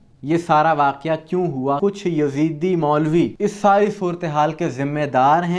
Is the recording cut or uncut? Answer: cut